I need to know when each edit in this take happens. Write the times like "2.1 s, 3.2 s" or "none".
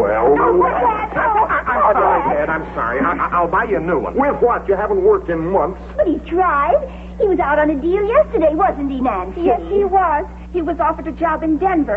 6.6 s